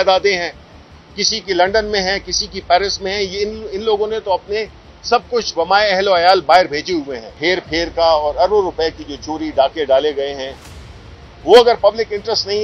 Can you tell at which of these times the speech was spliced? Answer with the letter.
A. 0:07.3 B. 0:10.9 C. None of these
A